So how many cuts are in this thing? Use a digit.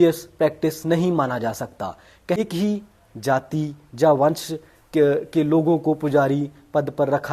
1